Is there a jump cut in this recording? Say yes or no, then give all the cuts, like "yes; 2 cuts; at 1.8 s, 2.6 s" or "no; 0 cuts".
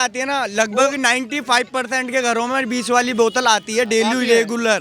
no; 0 cuts